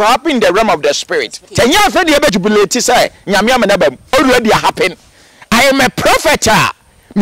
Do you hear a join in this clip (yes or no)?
yes